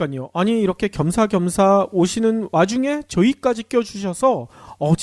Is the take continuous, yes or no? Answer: no